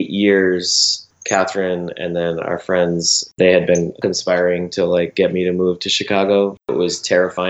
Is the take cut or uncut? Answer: cut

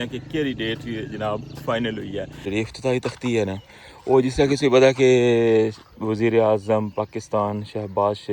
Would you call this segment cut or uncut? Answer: cut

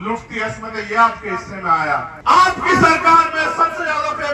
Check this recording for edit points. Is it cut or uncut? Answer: cut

